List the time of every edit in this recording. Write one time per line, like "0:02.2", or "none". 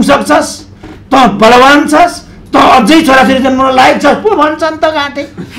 none